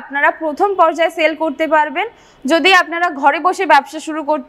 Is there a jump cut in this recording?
no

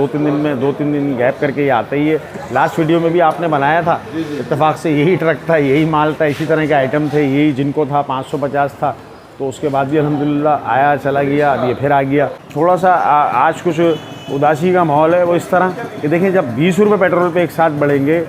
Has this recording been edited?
yes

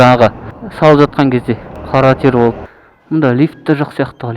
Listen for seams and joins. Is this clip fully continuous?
no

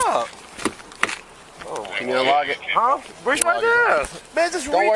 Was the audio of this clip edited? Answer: no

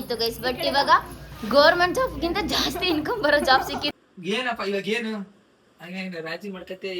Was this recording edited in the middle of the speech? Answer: yes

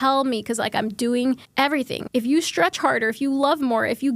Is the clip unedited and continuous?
no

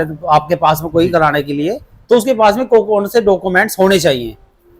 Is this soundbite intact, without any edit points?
yes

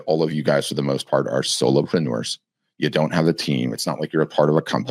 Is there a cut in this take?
no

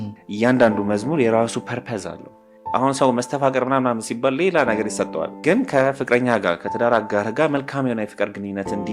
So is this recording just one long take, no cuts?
no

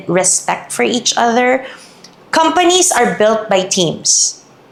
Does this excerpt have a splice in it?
no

